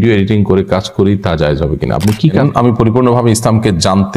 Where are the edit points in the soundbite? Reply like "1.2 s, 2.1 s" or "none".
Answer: 2.4 s